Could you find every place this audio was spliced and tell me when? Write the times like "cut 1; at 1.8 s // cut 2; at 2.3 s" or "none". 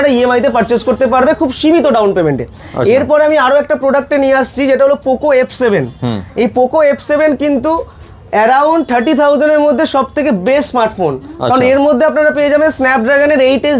none

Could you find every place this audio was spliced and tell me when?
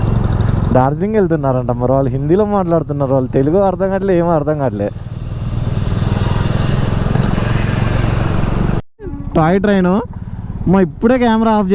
cut 1; at 9.0 s

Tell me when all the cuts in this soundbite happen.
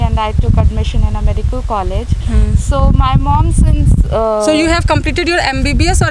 none

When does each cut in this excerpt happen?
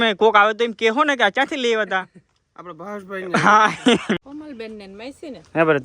cut 1; at 4.2 s

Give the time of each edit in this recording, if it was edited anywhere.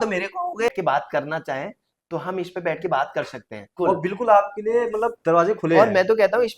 cut 1; at 0.8 s // cut 2; at 3.7 s

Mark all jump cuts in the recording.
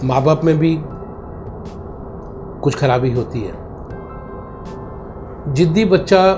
none

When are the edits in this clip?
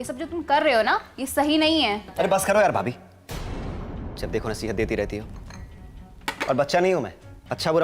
none

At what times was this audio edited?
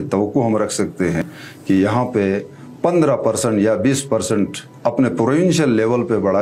cut 1; at 1.2 s

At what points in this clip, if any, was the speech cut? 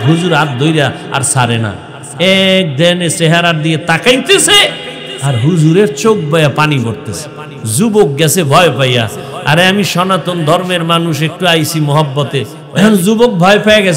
cut 1; at 12.6 s

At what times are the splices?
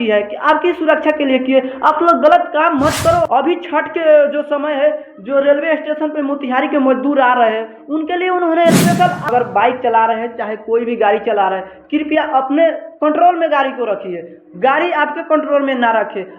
cut 1; at 3.3 s // cut 2; at 9.3 s

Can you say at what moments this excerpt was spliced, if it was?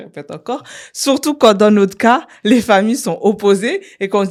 none

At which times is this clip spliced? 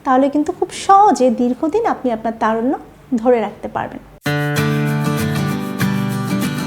cut 1; at 4.1 s

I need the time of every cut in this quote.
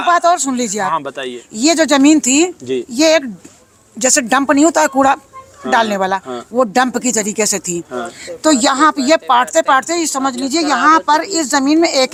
none

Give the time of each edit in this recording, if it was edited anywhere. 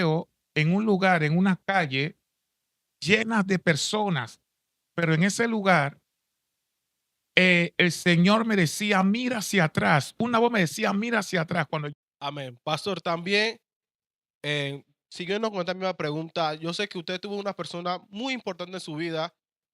cut 1; at 11.9 s

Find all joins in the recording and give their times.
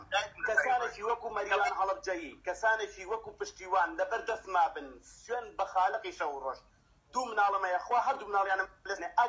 none

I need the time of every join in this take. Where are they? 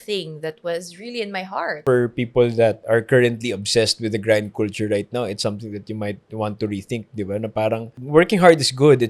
cut 1; at 1.8 s // cut 2; at 2.8 s // cut 3; at 8.0 s

